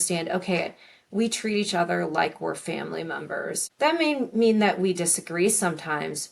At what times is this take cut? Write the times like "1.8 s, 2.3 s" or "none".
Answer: 3.7 s